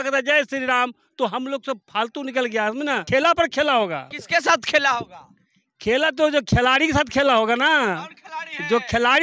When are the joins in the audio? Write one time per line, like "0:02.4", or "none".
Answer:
0:03.0
0:04.1